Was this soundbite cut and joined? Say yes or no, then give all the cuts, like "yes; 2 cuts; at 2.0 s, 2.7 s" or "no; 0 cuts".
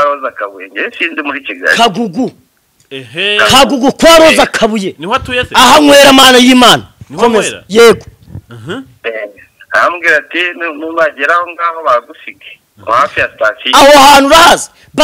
no; 0 cuts